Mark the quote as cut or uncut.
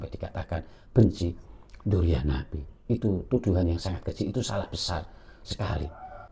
uncut